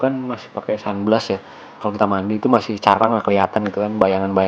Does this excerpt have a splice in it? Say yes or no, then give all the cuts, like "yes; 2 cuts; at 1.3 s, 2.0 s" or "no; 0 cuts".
yes; 1 cut; at 1.8 s